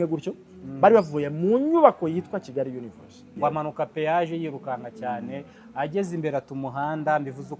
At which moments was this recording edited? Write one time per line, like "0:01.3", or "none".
0:03.3